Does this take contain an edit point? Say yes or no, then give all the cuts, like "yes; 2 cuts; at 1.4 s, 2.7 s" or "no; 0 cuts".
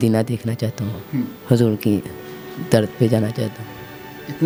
no; 0 cuts